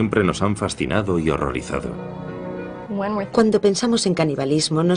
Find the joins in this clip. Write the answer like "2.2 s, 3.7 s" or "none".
none